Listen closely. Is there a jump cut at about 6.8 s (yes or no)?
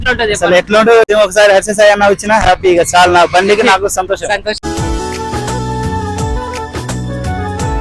no